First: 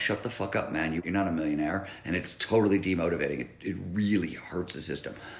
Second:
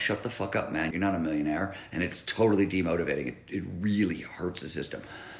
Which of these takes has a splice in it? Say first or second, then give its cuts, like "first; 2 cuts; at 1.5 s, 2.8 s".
second; 1 cut; at 0.9 s